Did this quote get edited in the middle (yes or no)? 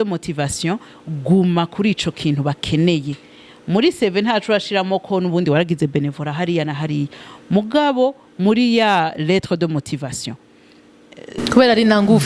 no